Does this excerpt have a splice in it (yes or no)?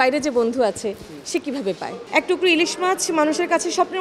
yes